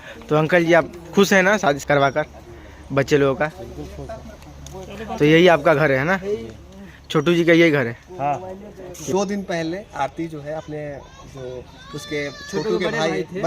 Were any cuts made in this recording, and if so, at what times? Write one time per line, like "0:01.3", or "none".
0:01.7
0:09.1